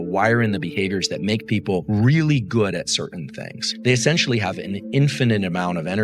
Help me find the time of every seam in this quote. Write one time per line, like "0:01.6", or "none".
0:03.7